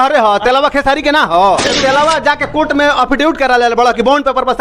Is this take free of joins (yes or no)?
no